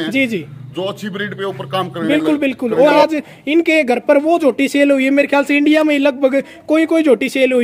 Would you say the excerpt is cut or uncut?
cut